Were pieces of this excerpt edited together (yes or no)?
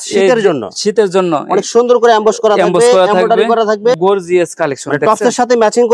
yes